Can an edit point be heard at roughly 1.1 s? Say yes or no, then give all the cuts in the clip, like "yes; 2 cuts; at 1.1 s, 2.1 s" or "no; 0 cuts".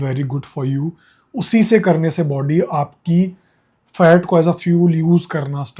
no; 0 cuts